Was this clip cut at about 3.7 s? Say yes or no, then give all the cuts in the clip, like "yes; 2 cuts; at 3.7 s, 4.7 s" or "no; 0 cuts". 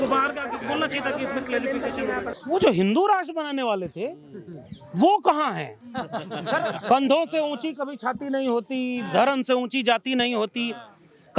no; 1 cut; at 2.3 s